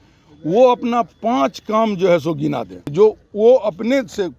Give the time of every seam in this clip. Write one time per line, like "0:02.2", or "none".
0:02.9